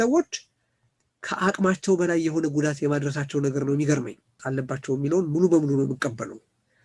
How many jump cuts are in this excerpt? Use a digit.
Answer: 1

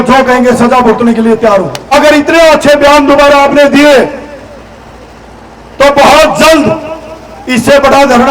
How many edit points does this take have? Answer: 1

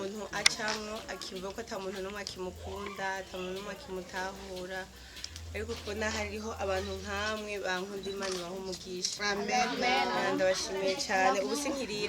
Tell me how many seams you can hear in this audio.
0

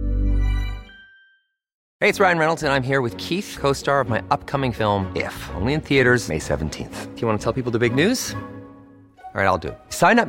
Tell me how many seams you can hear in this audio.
1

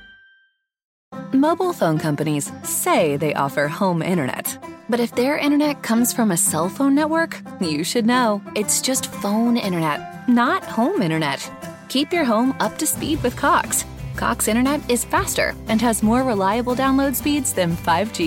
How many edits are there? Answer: 1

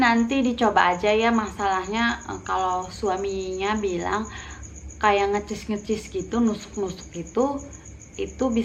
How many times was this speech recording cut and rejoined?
0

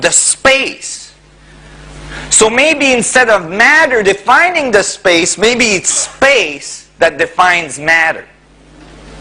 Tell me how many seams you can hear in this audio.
1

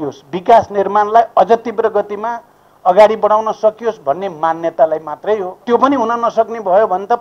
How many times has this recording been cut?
1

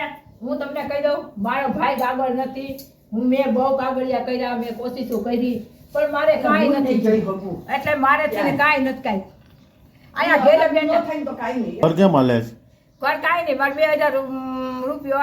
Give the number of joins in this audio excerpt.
1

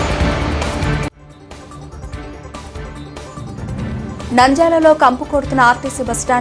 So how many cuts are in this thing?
3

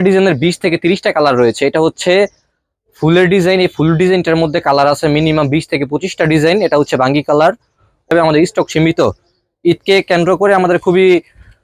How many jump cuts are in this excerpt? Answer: 1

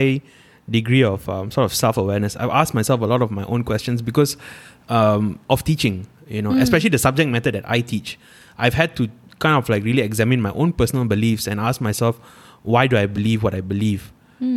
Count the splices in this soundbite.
0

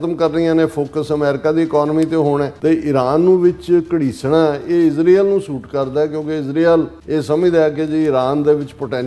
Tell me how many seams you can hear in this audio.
2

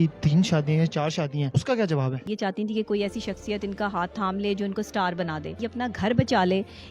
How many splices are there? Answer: 3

